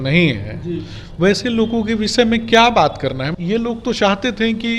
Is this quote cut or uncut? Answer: cut